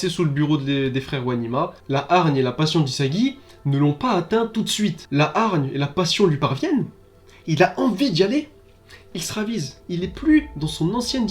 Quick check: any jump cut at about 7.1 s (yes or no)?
no